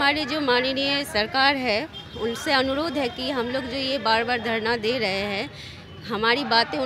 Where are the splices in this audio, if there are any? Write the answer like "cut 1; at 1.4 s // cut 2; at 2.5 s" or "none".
none